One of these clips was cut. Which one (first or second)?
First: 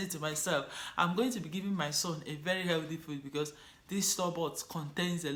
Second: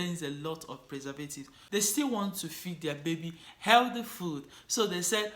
second